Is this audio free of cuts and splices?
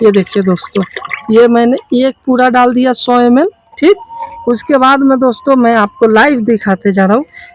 yes; 0 cuts

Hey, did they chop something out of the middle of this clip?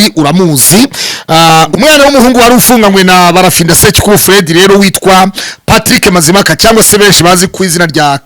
yes; 1 cut; at 1.7 s

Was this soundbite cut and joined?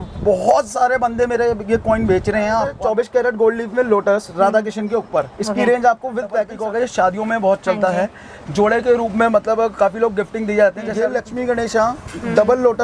yes; 3 cuts; at 2.7 s, 6.5 s, 11.0 s

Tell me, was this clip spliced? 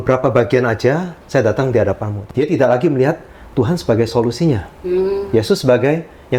yes; 1 cut; at 2.1 s

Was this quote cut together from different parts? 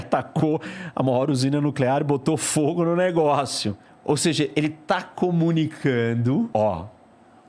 yes; 2 cuts; at 3.9 s, 6.5 s

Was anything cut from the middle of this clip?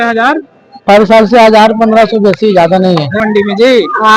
yes; 1 cut; at 3.2 s

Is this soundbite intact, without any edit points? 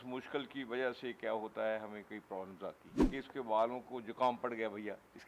no; 1 cut; at 2.9 s

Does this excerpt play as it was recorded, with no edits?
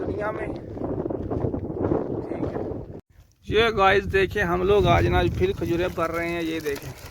no; 1 cut; at 3.0 s

